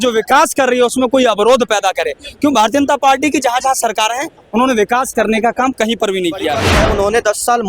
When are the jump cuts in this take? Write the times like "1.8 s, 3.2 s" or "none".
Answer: 6.7 s

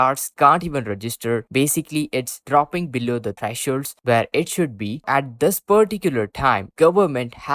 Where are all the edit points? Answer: 5.0 s, 6.7 s

